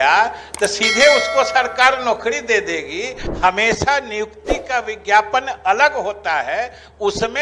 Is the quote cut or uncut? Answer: cut